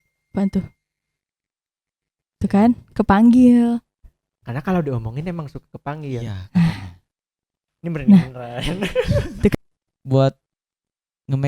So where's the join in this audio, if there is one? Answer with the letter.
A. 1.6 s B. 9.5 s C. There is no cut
B